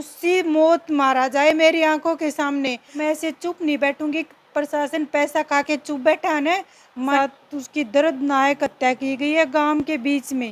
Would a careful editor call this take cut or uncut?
cut